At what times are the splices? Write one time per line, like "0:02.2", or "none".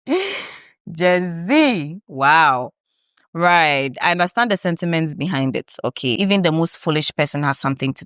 0:06.2